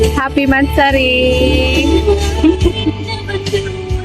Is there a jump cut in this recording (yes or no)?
no